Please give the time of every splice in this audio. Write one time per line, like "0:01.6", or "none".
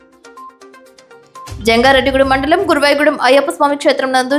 none

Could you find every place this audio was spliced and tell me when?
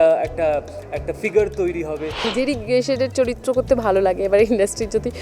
0:02.3

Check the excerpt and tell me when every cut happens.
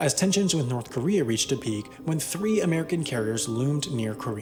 none

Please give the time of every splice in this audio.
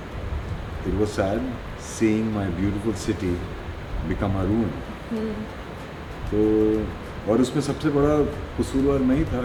none

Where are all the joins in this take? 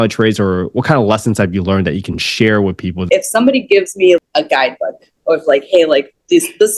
0:03.0
0:04.2

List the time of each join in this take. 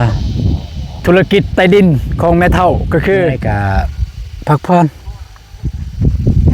0:03.5

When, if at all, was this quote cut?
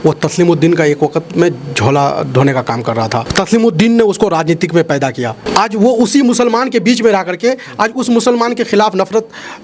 0:03.3

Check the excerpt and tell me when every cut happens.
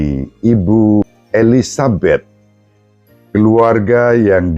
0:01.2

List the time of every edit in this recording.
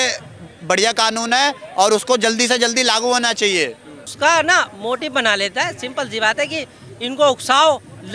0:04.1

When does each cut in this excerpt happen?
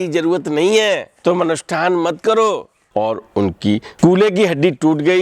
0:01.1
0:02.8

